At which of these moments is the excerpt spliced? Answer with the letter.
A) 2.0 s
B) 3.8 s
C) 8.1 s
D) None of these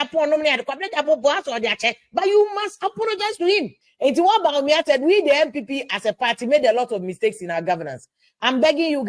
B